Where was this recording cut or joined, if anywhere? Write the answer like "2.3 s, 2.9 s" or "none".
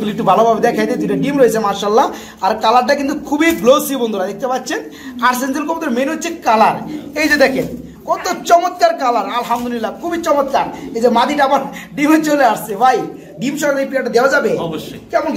none

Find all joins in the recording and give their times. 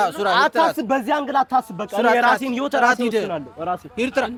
none

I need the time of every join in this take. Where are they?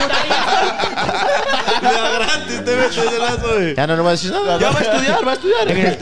none

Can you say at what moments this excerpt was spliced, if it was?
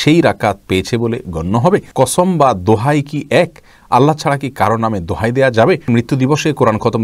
1.9 s, 5.8 s

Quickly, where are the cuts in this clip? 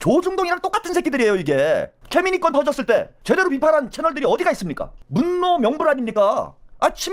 2.0 s, 5.0 s

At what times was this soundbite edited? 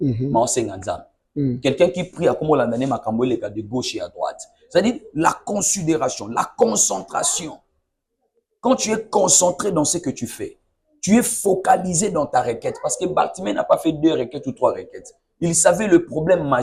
none

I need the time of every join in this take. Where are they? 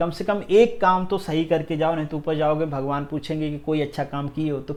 none

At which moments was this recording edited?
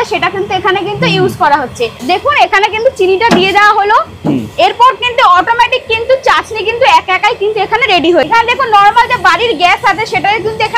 2.0 s, 8.3 s

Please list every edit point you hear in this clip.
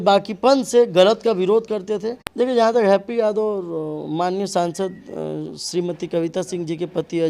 2.2 s

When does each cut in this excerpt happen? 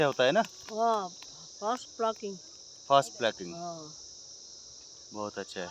none

